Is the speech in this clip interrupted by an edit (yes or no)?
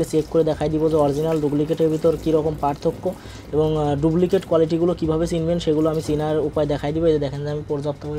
no